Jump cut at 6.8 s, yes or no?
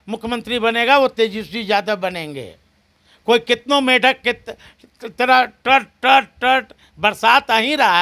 no